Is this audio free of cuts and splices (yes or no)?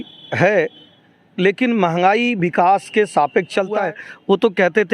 no